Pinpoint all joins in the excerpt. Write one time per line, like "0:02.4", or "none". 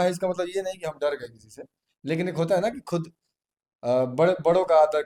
none

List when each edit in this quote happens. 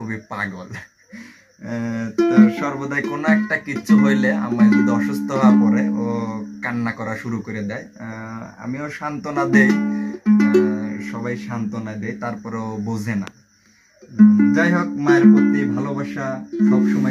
none

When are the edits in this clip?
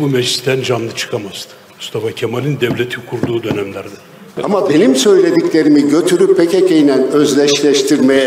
0:04.3

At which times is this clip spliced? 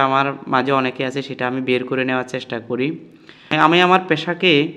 0:03.3

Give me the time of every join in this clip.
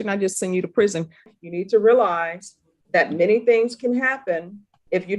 0:01.3

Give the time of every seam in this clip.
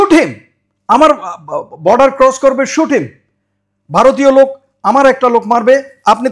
none

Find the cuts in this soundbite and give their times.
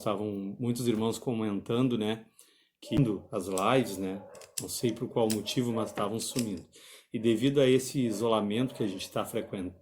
0:03.0

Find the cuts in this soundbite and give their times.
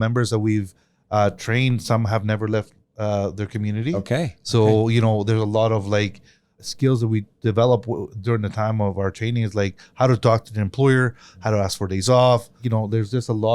0:06.6
0:12.6

